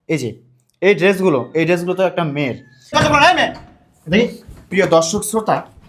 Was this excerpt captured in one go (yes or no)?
no